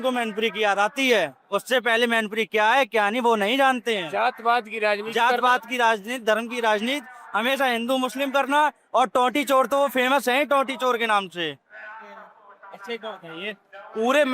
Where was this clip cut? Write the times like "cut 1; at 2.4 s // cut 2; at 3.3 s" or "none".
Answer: none

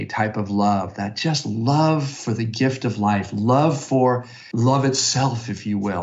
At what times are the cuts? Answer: cut 1; at 4.4 s

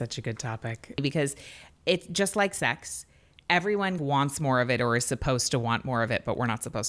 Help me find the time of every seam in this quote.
cut 1; at 1.0 s // cut 2; at 4.0 s

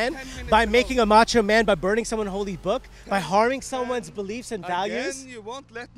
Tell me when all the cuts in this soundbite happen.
none

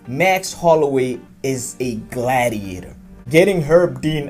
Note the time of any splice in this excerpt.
cut 1; at 3.1 s

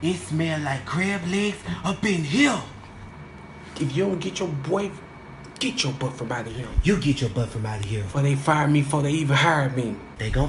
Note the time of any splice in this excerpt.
none

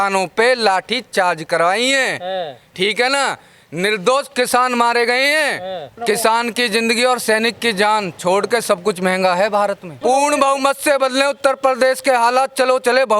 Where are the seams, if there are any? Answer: cut 1; at 6.0 s // cut 2; at 10.0 s

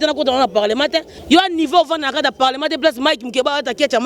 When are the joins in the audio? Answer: cut 1; at 1.1 s

